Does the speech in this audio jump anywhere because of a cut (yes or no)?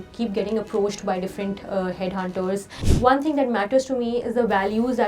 yes